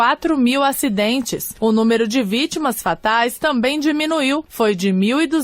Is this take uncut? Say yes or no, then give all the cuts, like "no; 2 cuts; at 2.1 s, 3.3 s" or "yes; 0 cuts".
no; 2 cuts; at 1.4 s, 4.5 s